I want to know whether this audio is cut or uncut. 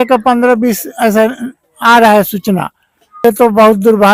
cut